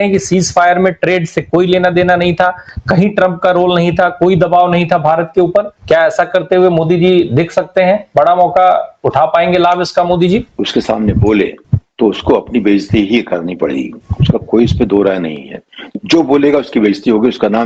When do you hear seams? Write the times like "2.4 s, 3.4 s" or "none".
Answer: none

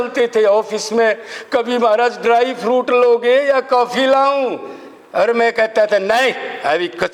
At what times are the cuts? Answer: none

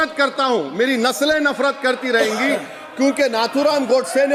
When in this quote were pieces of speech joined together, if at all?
none

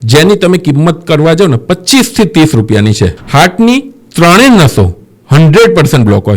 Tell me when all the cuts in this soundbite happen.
3.2 s

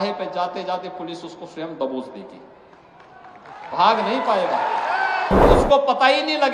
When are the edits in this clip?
5.4 s

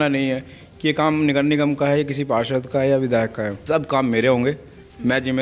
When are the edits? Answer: 3.6 s

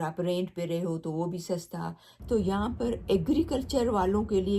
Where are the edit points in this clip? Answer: 2.1 s

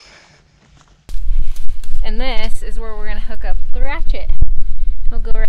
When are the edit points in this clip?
1.1 s

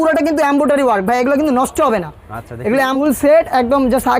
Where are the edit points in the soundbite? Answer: 3.0 s

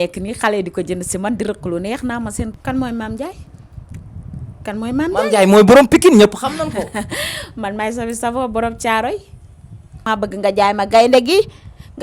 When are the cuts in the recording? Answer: 2.5 s, 10.0 s

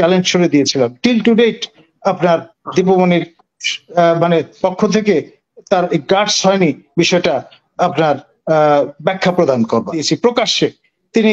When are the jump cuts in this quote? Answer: 10.1 s

